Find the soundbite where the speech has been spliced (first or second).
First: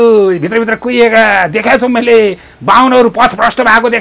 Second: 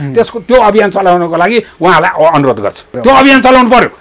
second